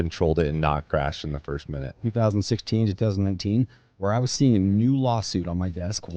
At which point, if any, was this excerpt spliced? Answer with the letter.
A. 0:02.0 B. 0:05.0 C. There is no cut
A